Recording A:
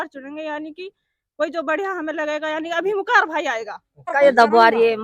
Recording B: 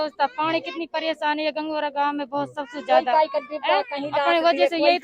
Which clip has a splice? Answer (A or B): A